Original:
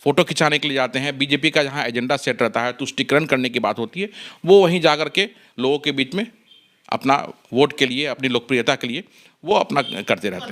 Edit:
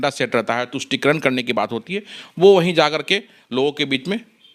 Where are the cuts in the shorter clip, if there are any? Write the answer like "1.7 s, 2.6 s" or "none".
none